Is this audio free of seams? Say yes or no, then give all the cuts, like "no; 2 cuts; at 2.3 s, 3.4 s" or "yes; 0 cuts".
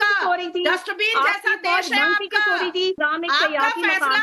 no; 1 cut; at 3.0 s